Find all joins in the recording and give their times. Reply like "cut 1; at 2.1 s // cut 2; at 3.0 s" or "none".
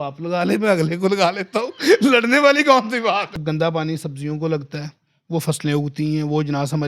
cut 1; at 3.4 s